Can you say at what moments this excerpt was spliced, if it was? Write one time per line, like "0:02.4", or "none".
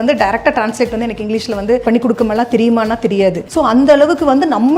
0:01.8
0:03.4